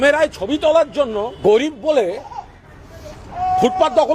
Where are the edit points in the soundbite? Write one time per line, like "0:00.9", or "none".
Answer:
0:01.4